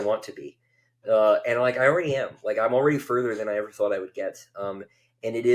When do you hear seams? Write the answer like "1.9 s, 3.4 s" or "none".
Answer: none

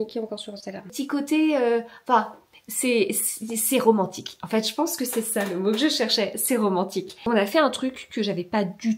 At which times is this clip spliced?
0.9 s, 7.2 s

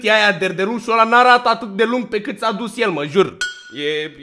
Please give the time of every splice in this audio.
none

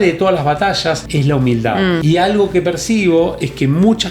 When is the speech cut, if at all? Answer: 1.1 s, 2.0 s

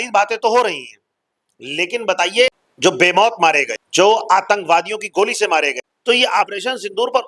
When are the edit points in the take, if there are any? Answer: 2.7 s, 3.8 s, 5.9 s

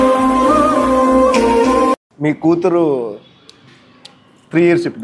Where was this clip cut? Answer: 2.1 s

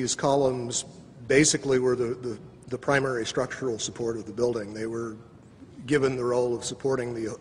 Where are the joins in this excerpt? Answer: 2.9 s

